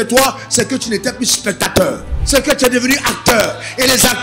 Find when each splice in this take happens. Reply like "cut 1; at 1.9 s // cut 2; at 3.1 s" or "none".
cut 1; at 2.1 s

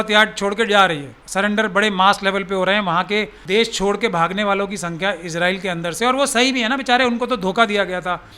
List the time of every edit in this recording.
cut 1; at 1.2 s // cut 2; at 3.4 s

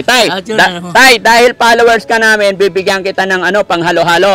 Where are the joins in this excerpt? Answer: none

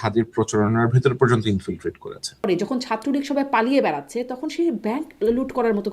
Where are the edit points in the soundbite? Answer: cut 1; at 2.5 s

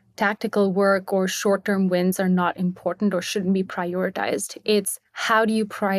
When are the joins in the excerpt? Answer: none

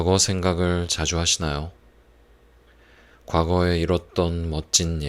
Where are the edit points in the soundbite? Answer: none

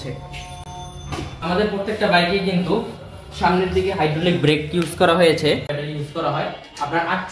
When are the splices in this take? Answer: cut 1; at 5.6 s

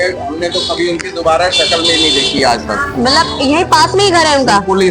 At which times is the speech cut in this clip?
none

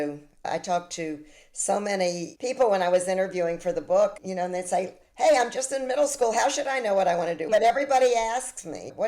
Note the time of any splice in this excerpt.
cut 1; at 7.5 s

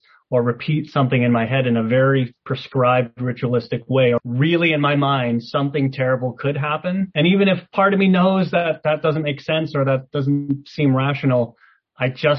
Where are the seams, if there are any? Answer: cut 1; at 4.2 s // cut 2; at 7.1 s

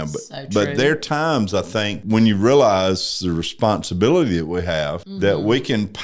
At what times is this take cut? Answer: cut 1; at 2.0 s // cut 2; at 5.0 s

